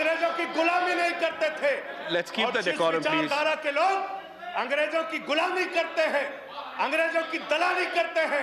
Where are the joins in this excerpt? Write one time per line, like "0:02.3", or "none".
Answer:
none